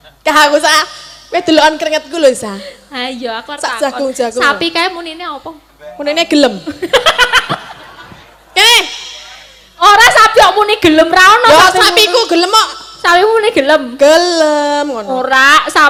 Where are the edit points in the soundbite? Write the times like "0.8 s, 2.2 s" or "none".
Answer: none